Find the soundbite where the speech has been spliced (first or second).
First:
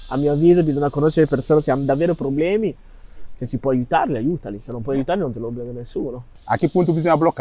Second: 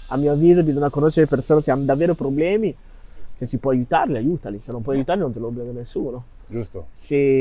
first